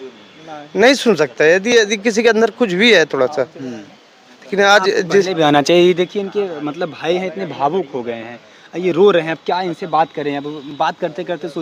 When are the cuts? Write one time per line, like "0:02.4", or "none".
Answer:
none